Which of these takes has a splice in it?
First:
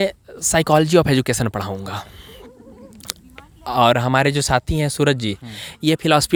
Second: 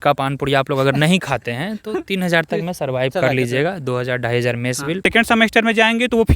second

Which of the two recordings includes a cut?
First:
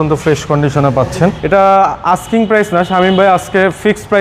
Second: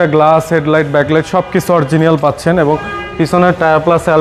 first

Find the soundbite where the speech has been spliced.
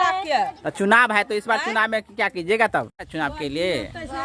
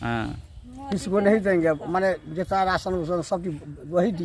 first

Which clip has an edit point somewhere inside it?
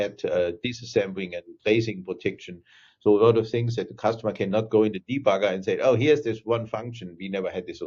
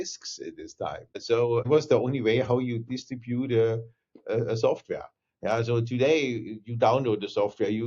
second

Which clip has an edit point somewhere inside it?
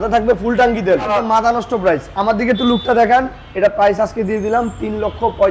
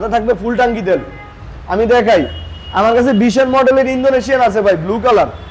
first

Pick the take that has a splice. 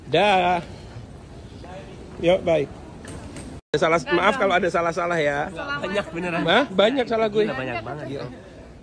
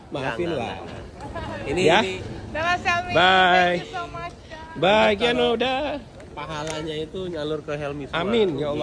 first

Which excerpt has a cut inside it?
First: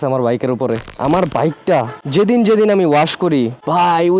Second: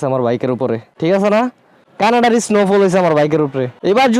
first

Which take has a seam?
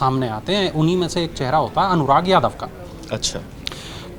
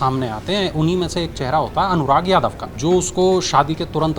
second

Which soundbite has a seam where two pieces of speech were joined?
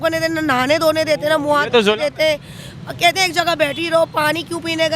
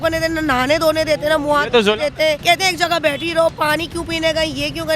second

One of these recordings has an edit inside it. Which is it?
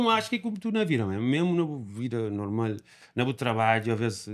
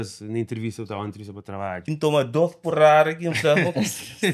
second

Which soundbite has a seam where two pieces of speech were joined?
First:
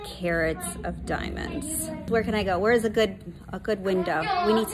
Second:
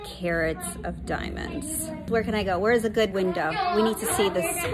second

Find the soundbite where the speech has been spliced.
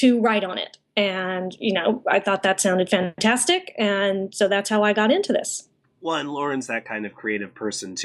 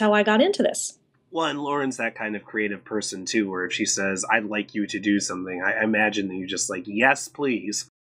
first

